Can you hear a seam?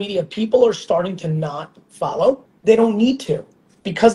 yes; 1 cut; at 2.5 s

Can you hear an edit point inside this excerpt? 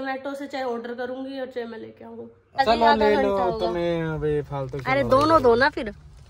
yes; 1 cut; at 2.6 s

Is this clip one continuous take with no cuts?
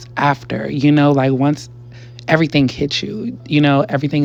yes; 0 cuts

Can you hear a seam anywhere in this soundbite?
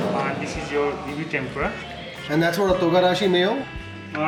no; 0 cuts

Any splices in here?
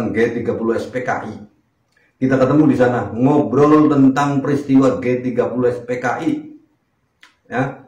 no; 0 cuts

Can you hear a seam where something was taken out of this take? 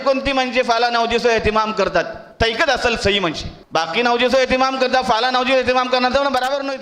yes; 2 cuts; at 2.2 s, 3.5 s

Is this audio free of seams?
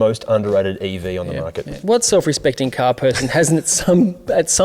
no; 1 cut; at 1.8 s

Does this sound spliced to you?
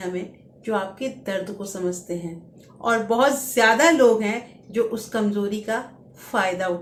no; 0 cuts

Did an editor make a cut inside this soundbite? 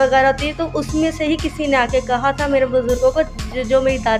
no; 0 cuts

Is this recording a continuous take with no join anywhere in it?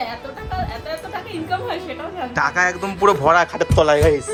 yes; 0 cuts

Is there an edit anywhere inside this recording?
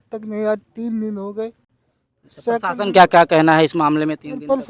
no; 0 cuts

